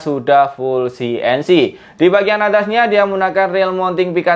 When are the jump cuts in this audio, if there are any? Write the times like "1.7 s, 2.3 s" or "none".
none